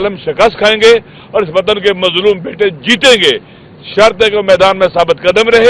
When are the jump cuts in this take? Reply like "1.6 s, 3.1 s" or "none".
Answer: none